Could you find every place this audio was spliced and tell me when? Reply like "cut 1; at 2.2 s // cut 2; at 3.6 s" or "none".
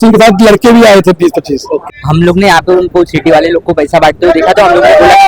cut 1; at 2.0 s